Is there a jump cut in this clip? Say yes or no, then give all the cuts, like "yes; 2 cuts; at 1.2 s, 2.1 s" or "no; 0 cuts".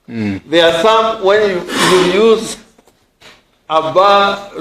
no; 0 cuts